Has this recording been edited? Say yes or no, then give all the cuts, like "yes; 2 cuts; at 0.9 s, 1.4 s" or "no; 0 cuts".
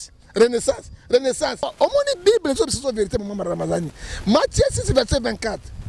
yes; 1 cut; at 1.7 s